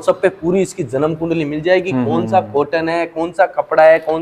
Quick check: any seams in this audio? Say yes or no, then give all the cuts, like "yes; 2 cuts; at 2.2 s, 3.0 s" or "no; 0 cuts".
no; 0 cuts